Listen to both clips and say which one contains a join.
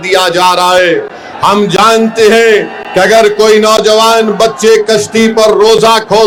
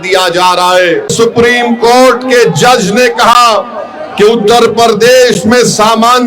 second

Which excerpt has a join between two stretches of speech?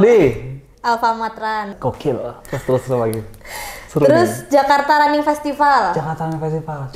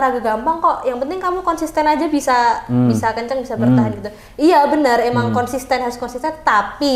first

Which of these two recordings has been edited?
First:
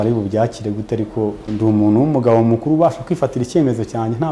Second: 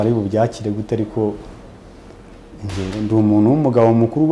first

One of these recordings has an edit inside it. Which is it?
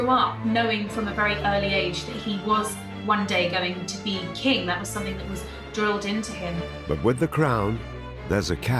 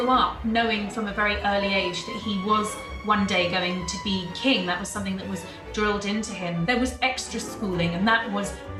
first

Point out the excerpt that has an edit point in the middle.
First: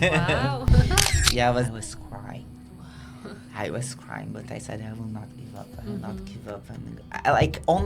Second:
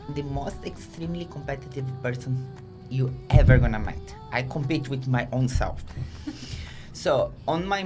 first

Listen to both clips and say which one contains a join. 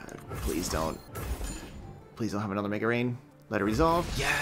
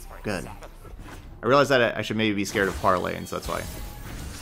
first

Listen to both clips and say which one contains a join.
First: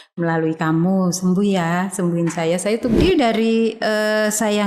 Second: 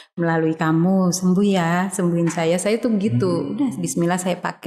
first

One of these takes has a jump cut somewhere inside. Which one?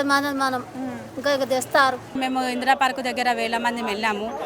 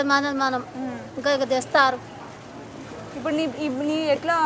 first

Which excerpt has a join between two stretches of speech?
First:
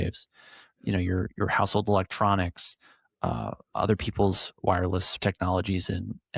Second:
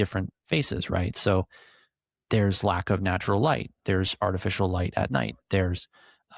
first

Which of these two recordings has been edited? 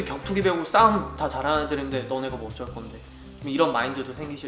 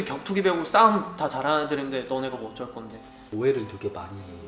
second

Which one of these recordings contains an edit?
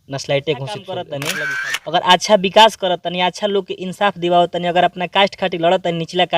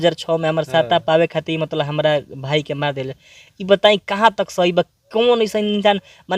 first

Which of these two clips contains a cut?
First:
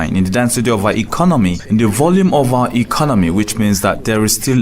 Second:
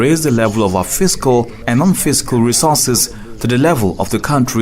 first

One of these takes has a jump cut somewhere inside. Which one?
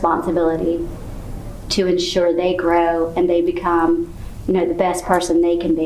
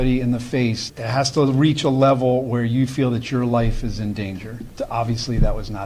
second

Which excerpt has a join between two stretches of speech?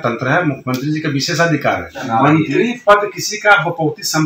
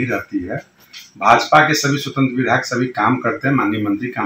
first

